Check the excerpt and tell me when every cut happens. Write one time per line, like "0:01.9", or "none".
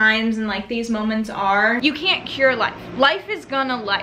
0:01.8